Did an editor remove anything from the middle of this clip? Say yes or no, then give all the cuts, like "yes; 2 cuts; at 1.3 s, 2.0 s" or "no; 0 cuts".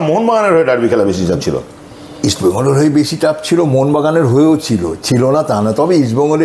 no; 0 cuts